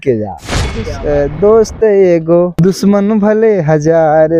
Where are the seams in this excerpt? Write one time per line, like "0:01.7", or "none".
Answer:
0:00.9
0:02.5